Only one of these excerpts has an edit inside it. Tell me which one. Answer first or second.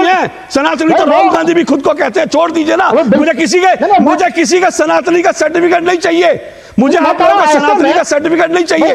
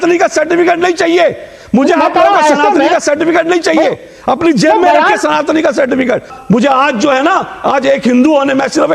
second